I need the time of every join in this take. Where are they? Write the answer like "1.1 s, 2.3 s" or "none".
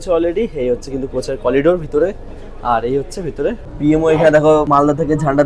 3.7 s, 4.7 s